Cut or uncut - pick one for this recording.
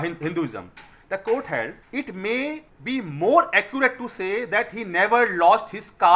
cut